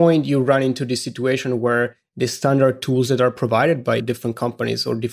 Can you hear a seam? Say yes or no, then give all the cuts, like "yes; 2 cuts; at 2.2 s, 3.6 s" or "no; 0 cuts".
no; 0 cuts